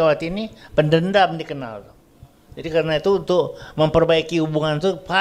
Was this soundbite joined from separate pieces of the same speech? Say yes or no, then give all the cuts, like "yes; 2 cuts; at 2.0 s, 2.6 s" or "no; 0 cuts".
no; 0 cuts